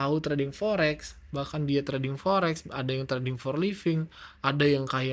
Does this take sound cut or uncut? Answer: uncut